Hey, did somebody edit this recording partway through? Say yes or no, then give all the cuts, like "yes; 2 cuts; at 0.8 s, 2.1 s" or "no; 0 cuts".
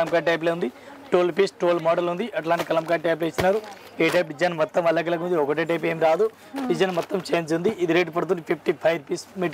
no; 0 cuts